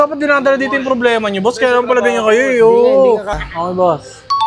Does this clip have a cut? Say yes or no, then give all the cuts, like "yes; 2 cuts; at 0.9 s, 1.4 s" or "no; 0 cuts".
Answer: yes; 1 cut; at 3.3 s